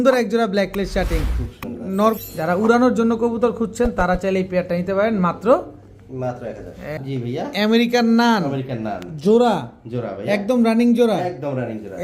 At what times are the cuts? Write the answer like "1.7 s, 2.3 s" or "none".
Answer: 2.2 s, 7.0 s